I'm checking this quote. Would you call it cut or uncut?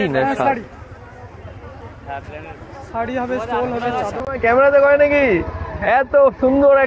cut